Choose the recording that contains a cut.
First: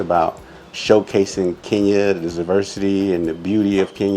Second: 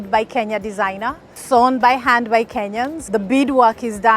second; 2 cuts; at 1.3 s, 3.0 s

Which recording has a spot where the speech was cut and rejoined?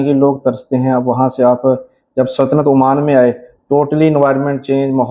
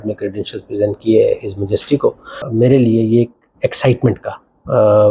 second; 1 cut; at 2.5 s

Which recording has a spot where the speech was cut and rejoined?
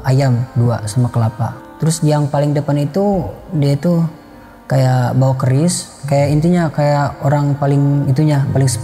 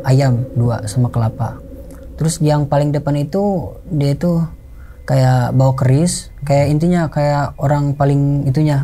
first; 1 cut; at 1.6 s

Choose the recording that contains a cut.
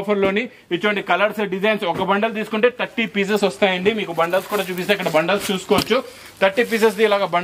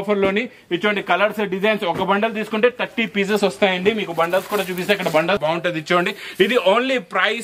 second; 1 cut; at 5.4 s

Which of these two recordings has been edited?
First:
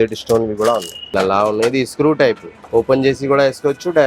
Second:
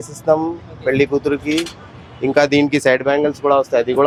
first; 2 cuts; at 1.0 s, 2.5 s

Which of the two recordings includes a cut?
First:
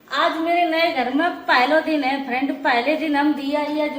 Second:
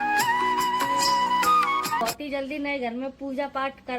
second; 1 cut; at 2.0 s

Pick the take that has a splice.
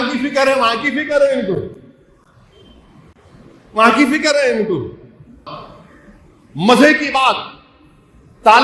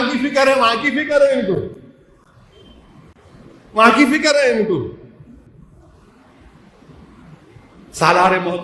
first; 1 cut; at 5.4 s

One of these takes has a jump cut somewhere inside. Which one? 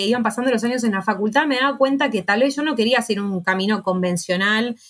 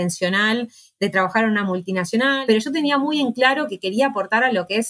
second; 1 cut; at 2.4 s

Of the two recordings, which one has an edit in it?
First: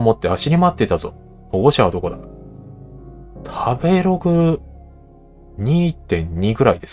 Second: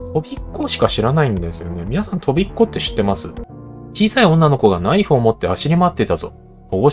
second; 1 cut; at 3.3 s

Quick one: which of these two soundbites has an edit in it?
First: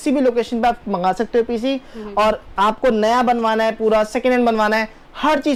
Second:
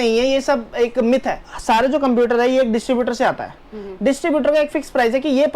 second; 1 cut; at 1.5 s

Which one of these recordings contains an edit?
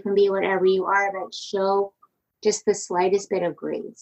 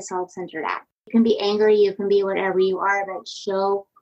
second; 1 cut; at 1.0 s

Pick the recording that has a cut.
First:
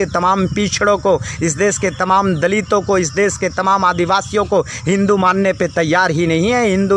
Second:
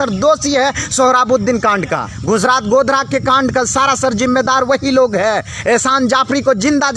second; 1 cut; at 2.1 s

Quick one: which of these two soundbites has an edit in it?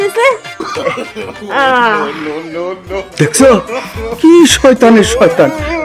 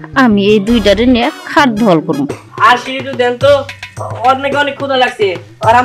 second; 1 cut; at 2.4 s

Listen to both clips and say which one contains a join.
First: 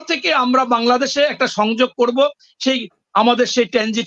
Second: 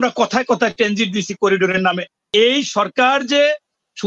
second; 1 cut; at 2.3 s

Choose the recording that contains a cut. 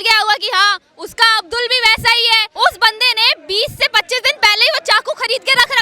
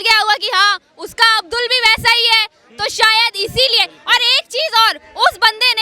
first; 1 cut; at 2.5 s

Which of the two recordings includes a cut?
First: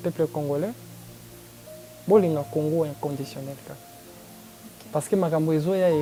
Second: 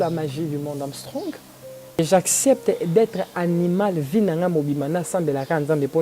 second; 1 cut; at 2.0 s

